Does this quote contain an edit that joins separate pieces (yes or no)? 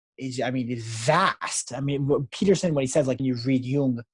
yes